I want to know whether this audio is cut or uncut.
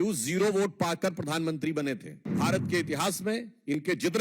cut